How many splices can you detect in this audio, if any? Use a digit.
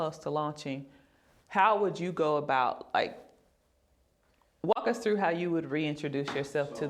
0